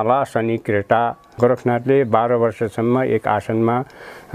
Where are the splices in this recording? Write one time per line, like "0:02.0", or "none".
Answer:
0:01.3